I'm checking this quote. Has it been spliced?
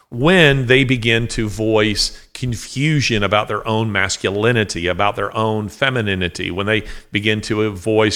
no; 0 cuts

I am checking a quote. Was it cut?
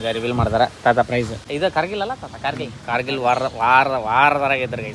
yes; 1 cut; at 1.4 s

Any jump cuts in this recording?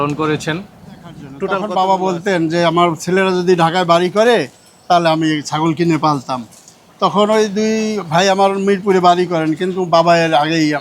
yes; 1 cut; at 1.6 s

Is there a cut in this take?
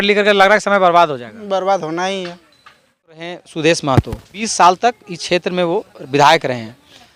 yes; 2 cuts; at 3.3 s, 4.4 s

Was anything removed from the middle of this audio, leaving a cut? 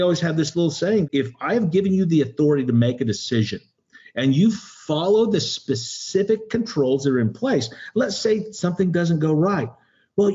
yes; 1 cut; at 1.0 s

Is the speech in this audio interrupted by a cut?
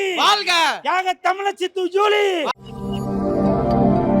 yes; 1 cut; at 2.5 s

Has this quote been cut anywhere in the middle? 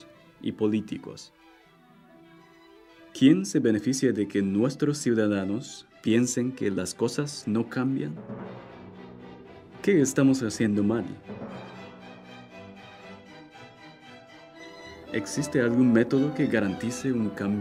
no; 0 cuts

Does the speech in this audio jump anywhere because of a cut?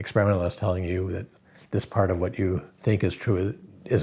yes; 1 cut; at 2.7 s

